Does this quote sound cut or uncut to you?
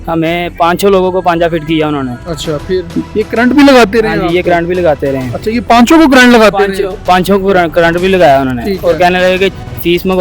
cut